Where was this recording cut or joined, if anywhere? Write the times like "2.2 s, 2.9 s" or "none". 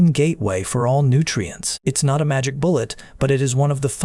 1.6 s